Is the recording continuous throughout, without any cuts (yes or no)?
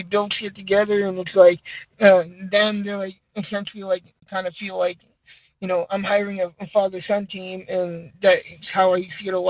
no